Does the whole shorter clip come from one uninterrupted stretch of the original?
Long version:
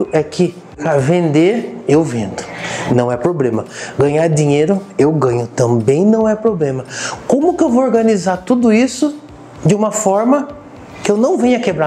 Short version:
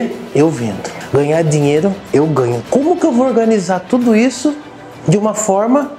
no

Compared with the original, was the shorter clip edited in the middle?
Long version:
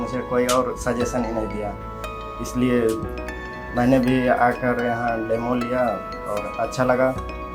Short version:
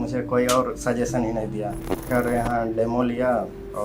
yes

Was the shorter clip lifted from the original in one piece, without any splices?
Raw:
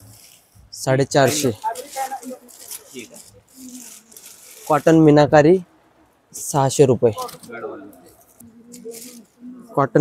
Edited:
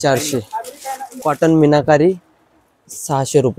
no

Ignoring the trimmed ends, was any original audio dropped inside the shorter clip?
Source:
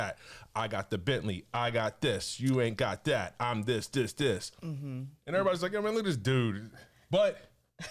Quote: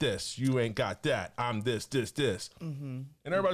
no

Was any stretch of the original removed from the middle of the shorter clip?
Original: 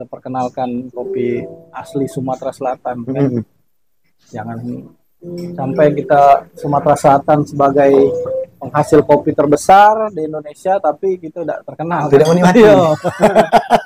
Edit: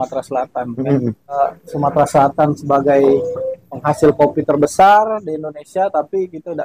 yes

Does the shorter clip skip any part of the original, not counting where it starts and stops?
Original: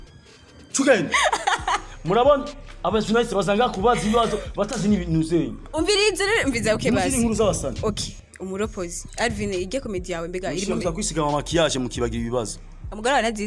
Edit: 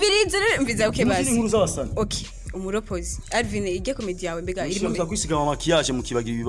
no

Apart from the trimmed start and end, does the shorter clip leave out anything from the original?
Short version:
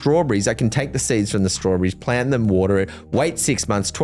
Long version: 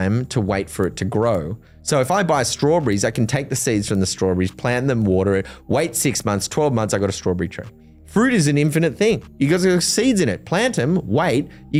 no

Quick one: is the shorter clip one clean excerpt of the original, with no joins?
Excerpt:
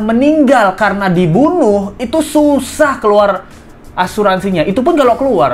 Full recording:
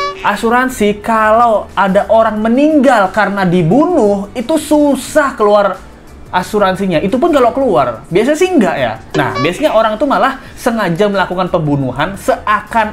yes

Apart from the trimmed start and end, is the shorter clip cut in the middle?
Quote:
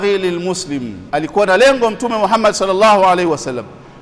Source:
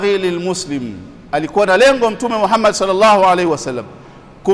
yes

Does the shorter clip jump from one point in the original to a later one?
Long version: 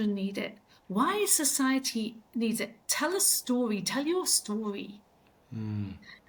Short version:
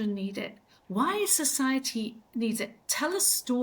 no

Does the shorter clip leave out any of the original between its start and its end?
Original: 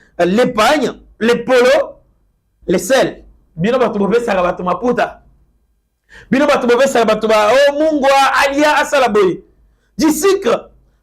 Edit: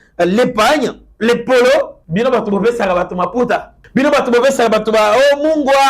yes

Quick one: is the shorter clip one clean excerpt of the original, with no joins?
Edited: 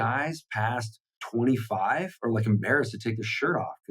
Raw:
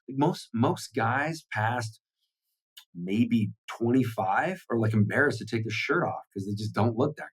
no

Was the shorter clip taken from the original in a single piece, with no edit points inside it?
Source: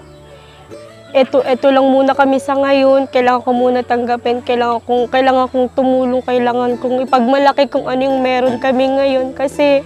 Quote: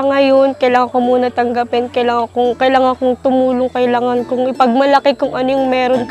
yes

